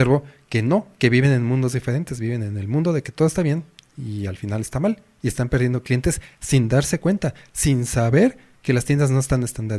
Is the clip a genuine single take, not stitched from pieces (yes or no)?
yes